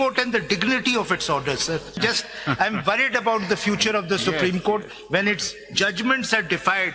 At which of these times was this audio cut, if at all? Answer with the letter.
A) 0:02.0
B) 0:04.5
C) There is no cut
A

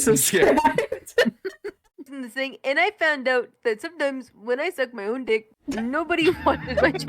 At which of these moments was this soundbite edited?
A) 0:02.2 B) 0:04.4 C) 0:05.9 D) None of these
A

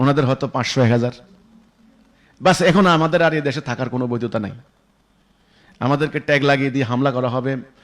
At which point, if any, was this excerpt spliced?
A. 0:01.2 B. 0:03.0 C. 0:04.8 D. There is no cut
D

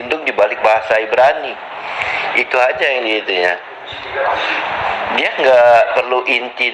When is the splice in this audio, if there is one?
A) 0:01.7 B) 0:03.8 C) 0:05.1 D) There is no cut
D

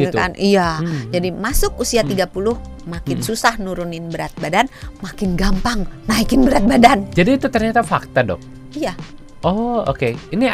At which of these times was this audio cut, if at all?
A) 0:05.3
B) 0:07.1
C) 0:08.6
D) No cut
D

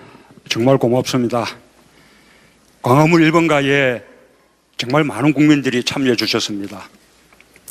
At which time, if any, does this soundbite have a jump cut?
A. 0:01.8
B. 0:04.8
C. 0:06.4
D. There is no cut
C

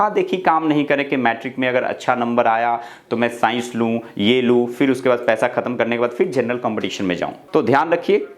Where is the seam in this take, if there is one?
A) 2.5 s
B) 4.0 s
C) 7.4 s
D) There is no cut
C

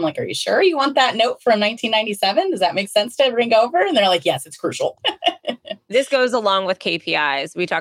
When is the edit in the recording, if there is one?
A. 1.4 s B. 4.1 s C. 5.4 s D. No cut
C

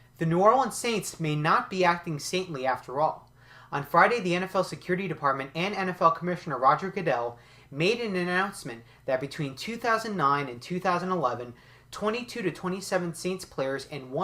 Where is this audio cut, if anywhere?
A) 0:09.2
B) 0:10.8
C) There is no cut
B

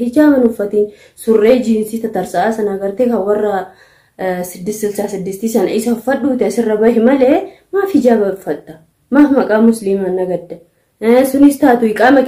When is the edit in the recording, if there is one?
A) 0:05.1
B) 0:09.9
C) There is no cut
C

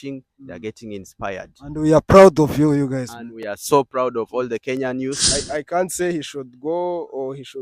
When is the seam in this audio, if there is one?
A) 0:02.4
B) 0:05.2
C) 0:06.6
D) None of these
B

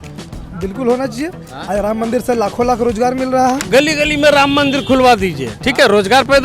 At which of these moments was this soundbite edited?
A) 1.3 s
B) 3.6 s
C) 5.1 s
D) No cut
B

